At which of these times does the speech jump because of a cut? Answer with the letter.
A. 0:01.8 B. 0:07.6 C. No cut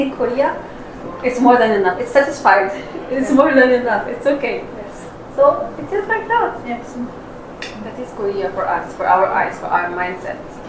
C